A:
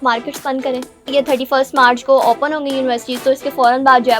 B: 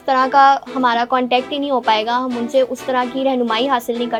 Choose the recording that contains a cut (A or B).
A